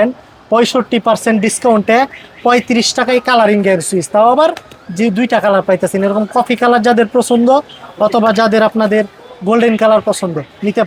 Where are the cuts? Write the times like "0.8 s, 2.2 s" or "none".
none